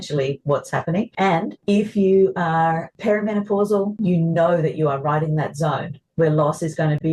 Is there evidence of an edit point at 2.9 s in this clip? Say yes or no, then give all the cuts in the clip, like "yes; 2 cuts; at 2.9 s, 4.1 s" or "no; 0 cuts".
yes; 3 cuts; at 1.4 s, 2.9 s, 3.9 s